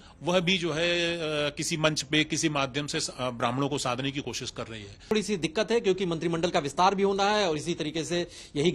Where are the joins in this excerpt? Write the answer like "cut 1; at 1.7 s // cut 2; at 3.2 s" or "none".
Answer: cut 1; at 5.1 s